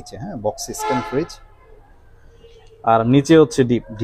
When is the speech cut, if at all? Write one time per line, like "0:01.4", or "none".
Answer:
none